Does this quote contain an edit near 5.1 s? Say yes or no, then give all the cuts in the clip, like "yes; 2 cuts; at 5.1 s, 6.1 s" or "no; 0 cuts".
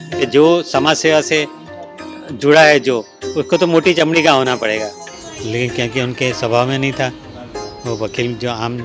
yes; 1 cut; at 5.1 s